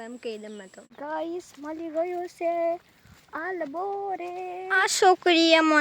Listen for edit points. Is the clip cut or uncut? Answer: cut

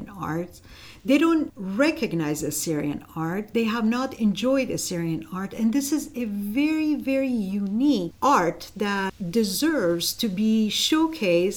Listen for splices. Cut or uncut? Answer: cut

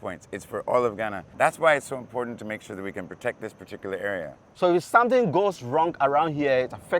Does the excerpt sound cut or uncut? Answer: cut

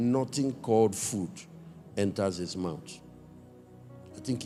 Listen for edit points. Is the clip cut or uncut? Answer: uncut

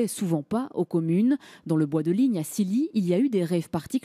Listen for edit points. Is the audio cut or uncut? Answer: cut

